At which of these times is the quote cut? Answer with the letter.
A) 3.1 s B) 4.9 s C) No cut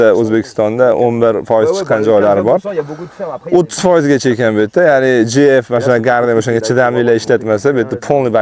C